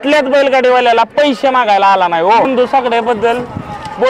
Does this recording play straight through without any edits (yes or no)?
no